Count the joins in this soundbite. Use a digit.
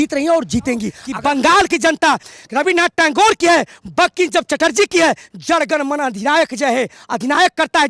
2